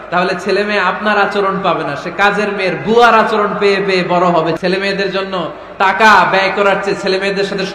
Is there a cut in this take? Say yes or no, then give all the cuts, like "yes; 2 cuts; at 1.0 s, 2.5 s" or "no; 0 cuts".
yes; 1 cut; at 4.6 s